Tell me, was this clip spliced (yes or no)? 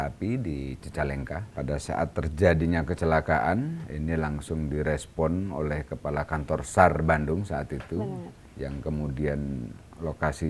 yes